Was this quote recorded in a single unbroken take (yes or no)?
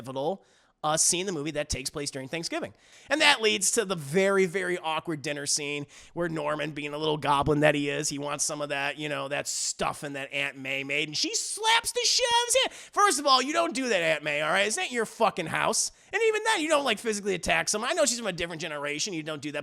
no